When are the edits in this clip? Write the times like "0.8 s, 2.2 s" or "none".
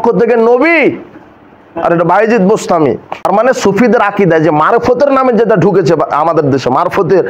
3.3 s